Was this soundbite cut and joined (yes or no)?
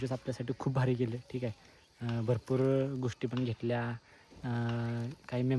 no